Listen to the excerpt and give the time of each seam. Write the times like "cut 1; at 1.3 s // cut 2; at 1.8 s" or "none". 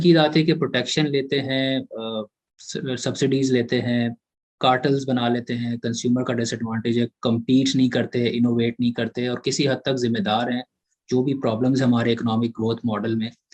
none